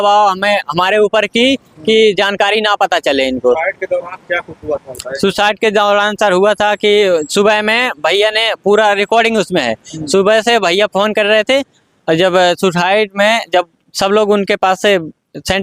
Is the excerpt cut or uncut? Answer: uncut